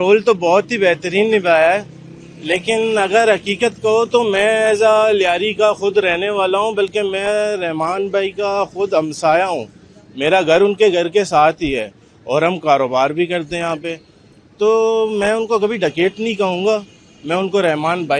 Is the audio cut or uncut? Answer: uncut